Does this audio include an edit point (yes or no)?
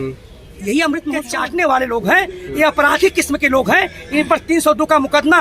yes